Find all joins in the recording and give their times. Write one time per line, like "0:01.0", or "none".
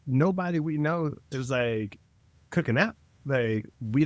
none